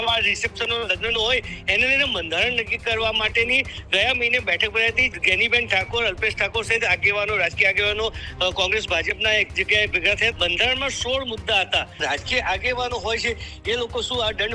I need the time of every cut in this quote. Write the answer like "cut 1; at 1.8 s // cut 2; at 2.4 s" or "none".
cut 1; at 5.1 s // cut 2; at 10.3 s // cut 3; at 12.0 s

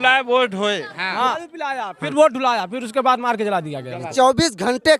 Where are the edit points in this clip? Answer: cut 1; at 1.5 s // cut 2; at 4.1 s

